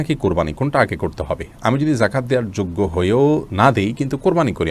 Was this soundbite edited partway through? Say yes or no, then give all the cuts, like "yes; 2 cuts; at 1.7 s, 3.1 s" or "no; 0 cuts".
no; 0 cuts